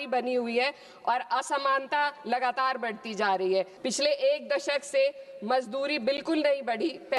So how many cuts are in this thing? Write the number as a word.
one